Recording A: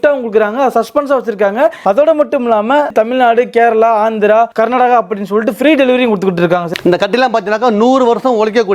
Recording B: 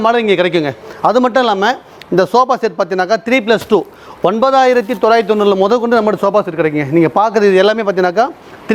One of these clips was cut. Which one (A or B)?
A